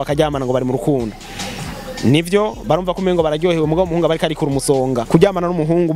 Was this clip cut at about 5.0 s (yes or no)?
yes